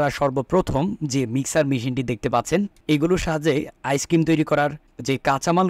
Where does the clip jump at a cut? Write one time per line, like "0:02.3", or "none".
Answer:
0:02.8